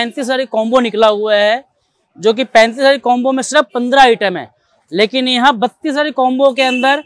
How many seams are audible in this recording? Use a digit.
0